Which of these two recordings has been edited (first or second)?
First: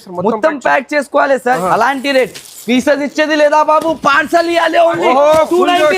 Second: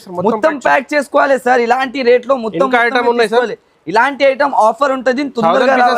first